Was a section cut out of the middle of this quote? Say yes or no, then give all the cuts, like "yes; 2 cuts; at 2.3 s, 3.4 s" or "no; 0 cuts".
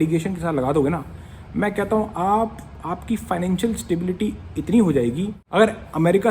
yes; 1 cut; at 5.3 s